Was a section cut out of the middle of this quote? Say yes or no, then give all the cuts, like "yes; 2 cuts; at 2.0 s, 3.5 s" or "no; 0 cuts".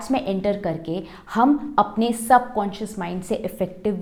no; 0 cuts